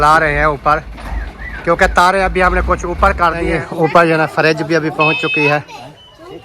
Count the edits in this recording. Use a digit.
1